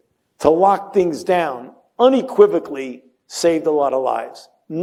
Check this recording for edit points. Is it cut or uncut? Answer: uncut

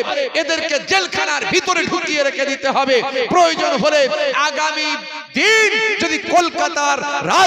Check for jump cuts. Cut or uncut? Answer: uncut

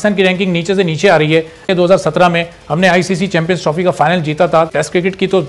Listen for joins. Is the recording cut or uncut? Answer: cut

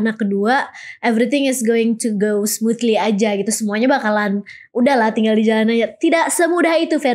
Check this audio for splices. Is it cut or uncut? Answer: uncut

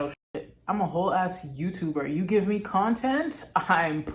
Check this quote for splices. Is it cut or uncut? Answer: uncut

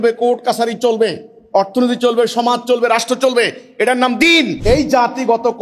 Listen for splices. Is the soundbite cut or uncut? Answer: cut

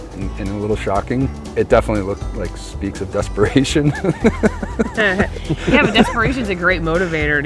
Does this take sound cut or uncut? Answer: cut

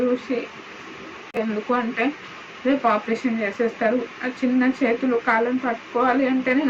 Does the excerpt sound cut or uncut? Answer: cut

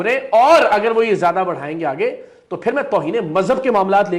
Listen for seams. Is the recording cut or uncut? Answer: uncut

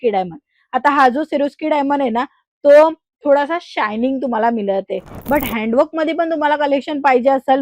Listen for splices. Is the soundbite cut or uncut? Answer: cut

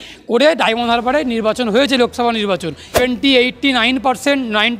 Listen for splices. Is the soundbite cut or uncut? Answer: cut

